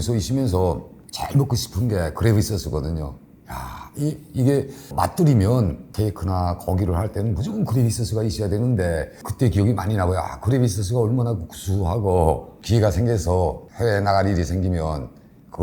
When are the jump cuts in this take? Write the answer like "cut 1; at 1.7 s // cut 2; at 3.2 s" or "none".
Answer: cut 1; at 4.9 s // cut 2; at 9.2 s // cut 3; at 12.5 s